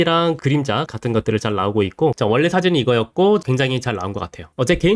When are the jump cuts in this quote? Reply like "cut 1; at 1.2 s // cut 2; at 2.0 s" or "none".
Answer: cut 1; at 2.2 s // cut 2; at 3.4 s